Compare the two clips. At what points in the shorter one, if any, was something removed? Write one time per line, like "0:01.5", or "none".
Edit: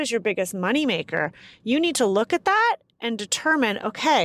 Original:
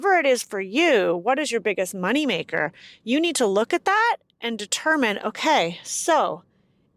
none